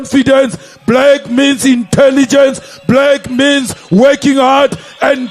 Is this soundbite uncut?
yes; 0 cuts

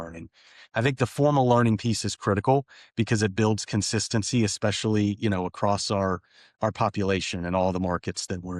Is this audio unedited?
yes; 0 cuts

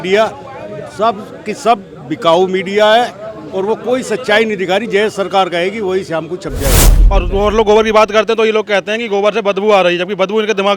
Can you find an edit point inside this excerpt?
yes; 1 cut; at 6.9 s

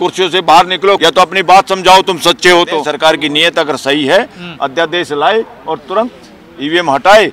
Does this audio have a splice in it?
yes; 2 cuts; at 1.0 s, 2.9 s

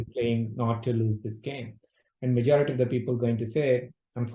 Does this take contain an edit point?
no; 0 cuts

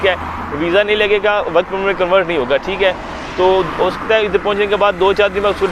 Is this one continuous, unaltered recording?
yes; 0 cuts

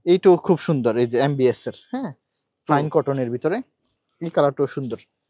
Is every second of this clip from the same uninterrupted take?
yes; 0 cuts

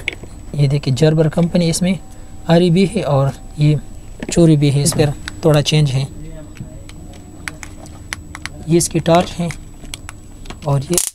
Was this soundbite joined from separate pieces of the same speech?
yes; 1 cut; at 4.9 s

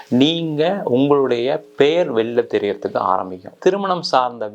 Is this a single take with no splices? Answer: no; 1 cut; at 3.6 s

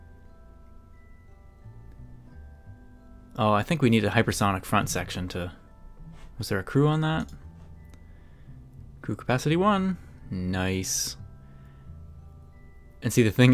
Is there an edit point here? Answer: no; 0 cuts

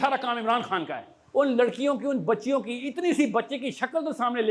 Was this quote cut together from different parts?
yes; 1 cut; at 1.1 s

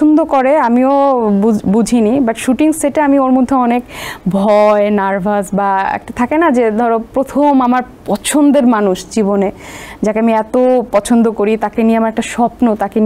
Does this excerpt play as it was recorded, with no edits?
yes; 0 cuts

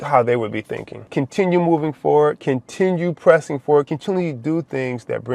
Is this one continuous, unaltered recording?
no; 2 cuts; at 1.1 s, 3.9 s

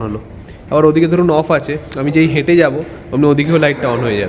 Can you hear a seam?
no; 0 cuts

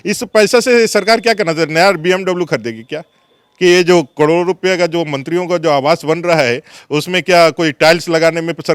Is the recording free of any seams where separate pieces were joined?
yes; 0 cuts

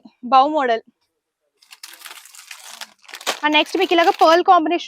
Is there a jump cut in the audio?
no; 0 cuts

